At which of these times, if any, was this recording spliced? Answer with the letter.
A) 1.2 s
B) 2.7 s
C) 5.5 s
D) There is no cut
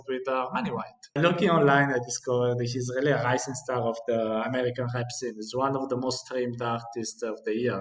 A